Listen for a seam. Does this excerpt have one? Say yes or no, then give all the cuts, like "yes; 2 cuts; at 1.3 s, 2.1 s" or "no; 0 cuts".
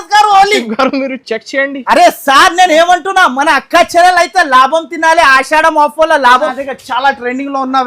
yes; 1 cut; at 6.5 s